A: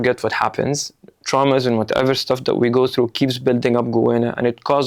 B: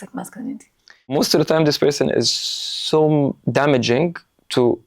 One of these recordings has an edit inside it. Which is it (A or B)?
B